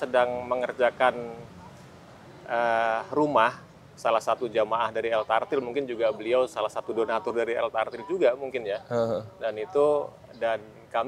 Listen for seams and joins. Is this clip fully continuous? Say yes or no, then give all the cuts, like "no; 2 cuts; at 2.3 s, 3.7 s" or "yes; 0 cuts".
yes; 0 cuts